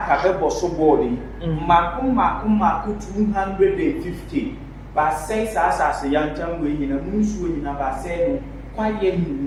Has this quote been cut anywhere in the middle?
no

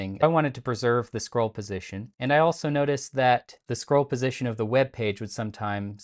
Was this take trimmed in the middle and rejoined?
no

